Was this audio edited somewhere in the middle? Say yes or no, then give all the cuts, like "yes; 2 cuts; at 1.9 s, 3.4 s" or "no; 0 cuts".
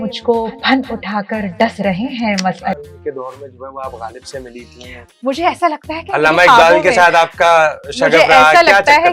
yes; 1 cut; at 2.7 s